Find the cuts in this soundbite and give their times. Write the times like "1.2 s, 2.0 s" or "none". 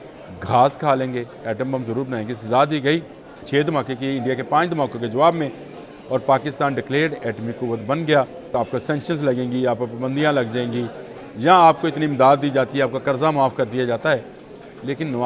3.4 s, 8.5 s